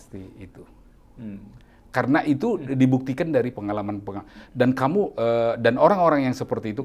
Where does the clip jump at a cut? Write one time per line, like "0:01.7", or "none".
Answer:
none